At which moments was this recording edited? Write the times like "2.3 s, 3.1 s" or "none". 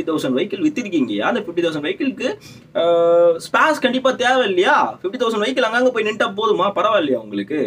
none

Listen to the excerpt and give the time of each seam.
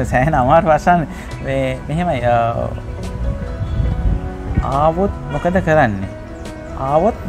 none

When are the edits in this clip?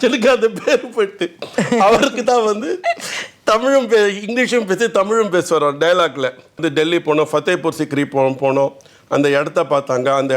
6.6 s

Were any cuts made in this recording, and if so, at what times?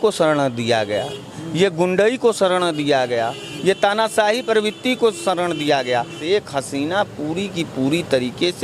6.2 s

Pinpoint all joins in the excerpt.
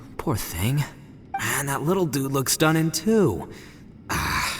1.4 s

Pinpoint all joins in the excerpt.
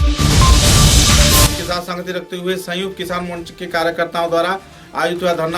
1.5 s

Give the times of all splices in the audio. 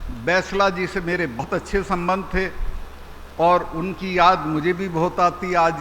1.4 s

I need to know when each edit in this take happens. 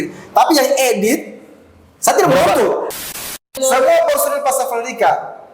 2.9 s

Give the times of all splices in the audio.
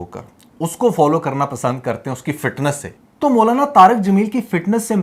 none

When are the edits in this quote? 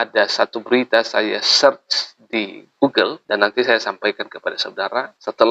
none

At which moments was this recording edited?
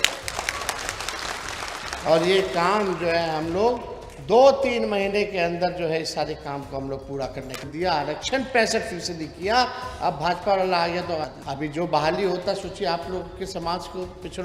7.6 s, 11.4 s

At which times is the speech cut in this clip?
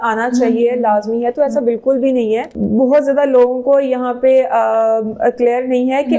2.5 s

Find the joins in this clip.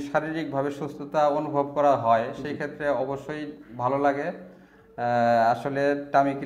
none

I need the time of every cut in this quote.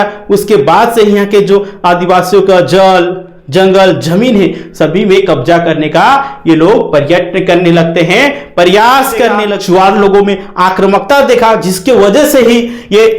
9.5 s

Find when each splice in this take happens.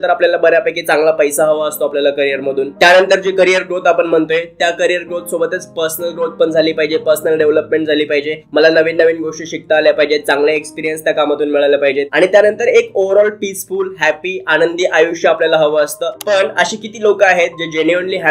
none

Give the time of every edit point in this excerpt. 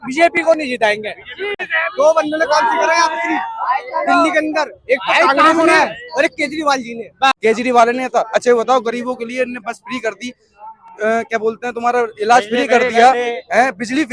1.7 s, 7.3 s

